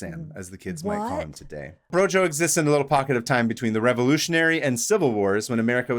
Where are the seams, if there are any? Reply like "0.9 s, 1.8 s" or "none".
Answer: 1.9 s